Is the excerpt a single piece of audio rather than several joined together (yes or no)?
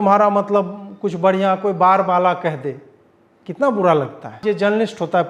no